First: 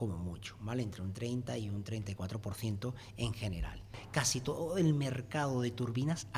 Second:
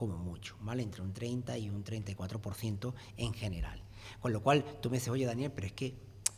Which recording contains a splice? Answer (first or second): first